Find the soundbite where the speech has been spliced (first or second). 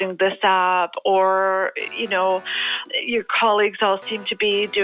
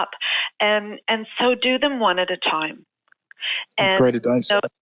first